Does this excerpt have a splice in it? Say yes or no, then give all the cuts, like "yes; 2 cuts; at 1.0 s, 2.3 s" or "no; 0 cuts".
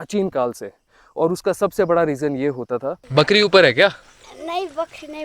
yes; 1 cut; at 3.0 s